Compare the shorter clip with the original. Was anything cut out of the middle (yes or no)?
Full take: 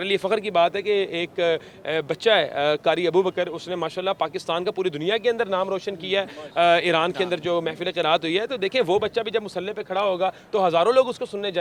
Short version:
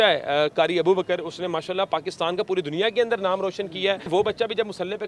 yes